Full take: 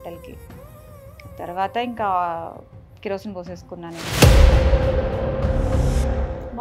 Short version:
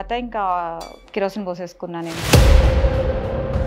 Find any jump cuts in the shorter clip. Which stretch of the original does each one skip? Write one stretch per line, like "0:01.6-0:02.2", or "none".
0:02.6-0:02.8